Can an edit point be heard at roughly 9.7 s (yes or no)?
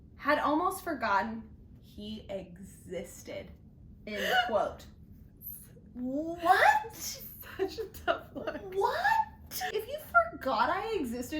yes